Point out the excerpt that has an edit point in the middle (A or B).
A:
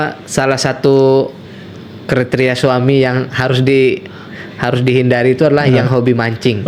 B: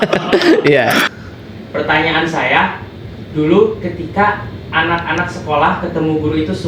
B